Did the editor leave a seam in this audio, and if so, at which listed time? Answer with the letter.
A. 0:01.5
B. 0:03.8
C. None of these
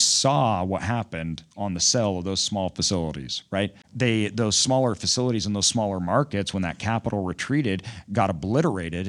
B